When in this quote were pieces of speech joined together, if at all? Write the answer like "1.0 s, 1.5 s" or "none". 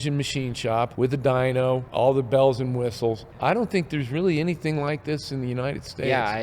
0.9 s, 1.9 s, 3.3 s